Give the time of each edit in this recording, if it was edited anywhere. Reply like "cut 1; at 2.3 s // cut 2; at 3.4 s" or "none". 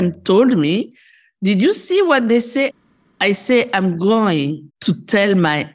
cut 1; at 2.7 s // cut 2; at 4.7 s